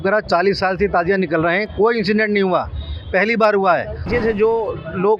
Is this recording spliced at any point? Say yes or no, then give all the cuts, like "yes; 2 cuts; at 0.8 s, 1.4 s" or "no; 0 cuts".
yes; 1 cut; at 4.0 s